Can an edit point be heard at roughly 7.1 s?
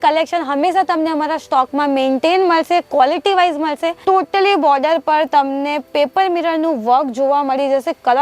no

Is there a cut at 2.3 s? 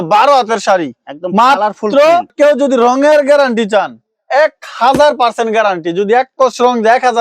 yes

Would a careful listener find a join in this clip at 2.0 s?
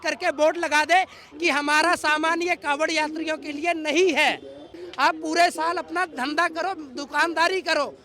no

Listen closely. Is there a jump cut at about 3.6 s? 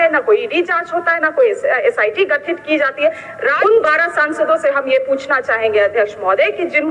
yes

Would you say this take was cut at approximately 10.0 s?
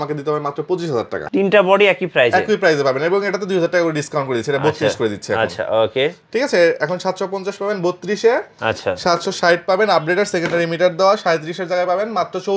no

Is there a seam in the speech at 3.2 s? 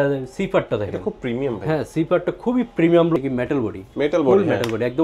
yes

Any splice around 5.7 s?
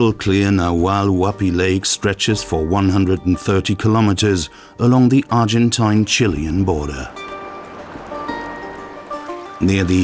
no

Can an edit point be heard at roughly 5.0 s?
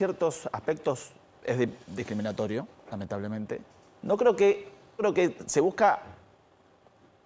yes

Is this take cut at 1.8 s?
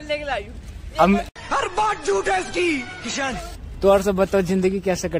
no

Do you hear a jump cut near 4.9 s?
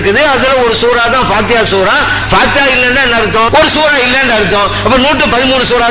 no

